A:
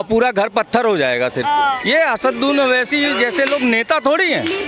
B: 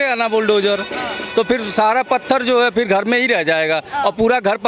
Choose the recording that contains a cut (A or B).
A